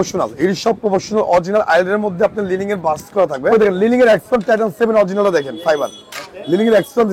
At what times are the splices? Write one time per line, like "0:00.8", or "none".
0:03.8